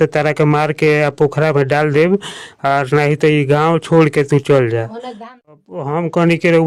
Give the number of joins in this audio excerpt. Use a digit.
1